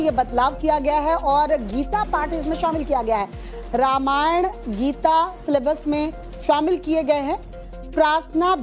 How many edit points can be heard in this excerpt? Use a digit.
1